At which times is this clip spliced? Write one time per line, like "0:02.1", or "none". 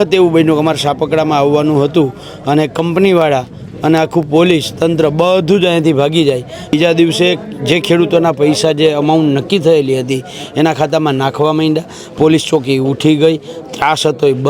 0:06.7